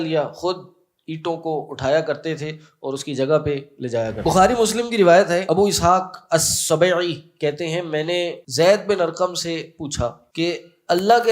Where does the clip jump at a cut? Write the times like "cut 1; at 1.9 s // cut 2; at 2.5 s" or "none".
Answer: cut 1; at 4.2 s // cut 2; at 5.4 s // cut 3; at 8.4 s // cut 4; at 10.2 s